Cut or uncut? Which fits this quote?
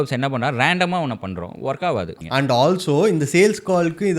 cut